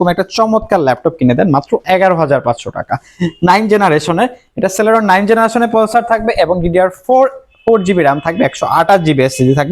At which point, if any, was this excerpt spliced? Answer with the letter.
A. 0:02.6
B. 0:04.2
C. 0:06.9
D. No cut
D